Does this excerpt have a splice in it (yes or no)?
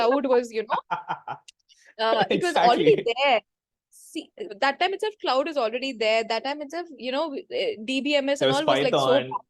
no